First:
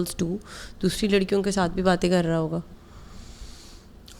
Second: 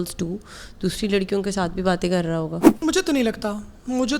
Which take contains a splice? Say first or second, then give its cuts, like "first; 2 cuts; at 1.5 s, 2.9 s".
second; 1 cut; at 2.7 s